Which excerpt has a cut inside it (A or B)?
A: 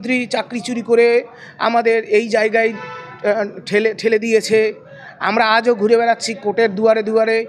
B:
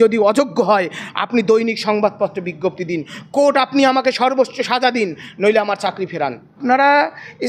B